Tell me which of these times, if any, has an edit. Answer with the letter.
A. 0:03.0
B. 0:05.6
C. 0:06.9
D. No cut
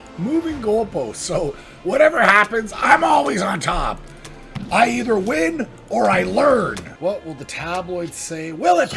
C